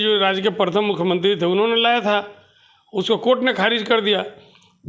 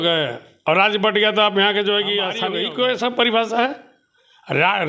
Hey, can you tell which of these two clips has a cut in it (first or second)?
second